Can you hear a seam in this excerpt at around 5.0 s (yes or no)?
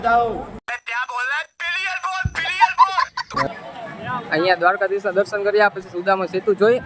no